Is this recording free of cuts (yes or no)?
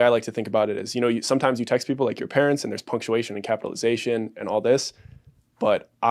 yes